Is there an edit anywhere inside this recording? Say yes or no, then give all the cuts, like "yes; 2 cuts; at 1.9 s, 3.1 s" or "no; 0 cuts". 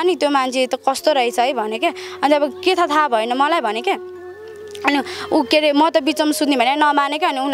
no; 0 cuts